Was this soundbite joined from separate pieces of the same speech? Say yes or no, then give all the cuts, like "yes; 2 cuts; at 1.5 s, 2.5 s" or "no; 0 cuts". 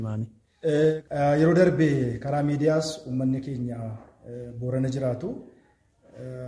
yes; 1 cut; at 0.9 s